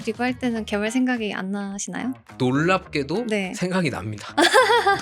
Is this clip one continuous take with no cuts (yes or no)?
no